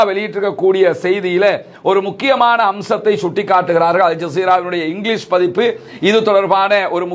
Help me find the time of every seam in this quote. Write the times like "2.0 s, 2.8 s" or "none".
none